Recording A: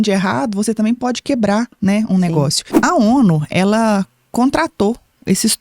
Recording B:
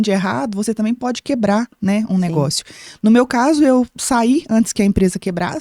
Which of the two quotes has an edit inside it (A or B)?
A